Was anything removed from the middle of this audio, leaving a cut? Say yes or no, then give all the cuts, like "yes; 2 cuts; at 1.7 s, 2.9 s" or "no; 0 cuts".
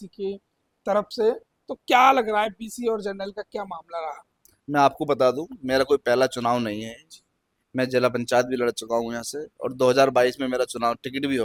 no; 0 cuts